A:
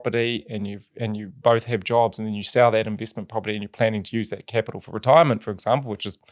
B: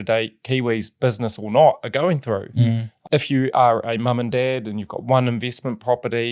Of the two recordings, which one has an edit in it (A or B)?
B